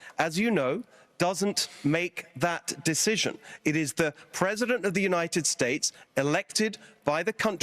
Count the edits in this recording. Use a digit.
0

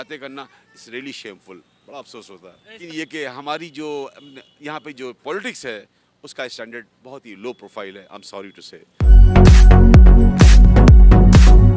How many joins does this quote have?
2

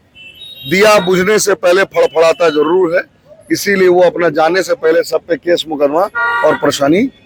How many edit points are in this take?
0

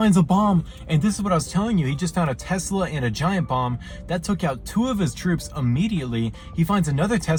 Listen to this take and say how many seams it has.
0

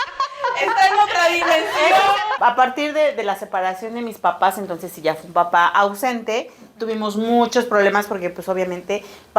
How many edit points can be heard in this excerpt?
1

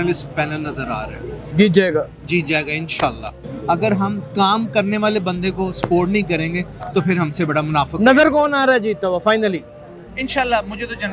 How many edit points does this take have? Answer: 1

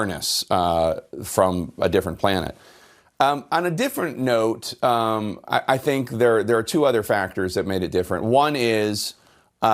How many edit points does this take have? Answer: 0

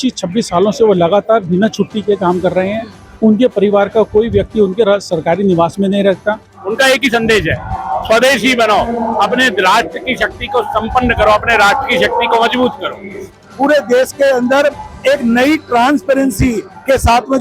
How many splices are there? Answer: 2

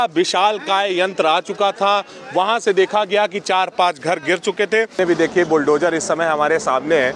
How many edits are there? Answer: 1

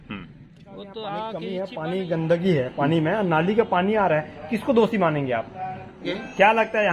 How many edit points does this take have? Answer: 2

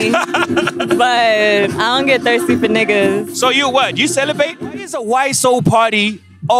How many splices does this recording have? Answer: 1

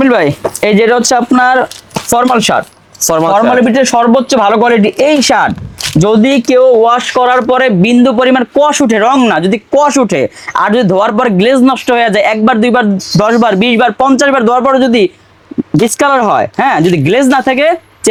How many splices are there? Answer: 0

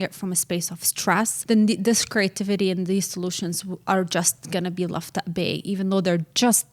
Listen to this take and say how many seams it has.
1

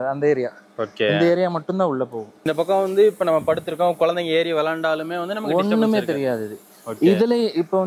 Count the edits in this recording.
0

